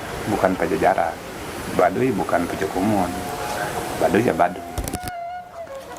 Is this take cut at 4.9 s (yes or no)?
yes